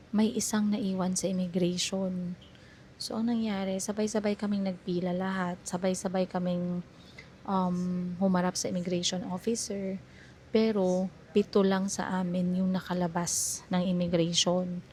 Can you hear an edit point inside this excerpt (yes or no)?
no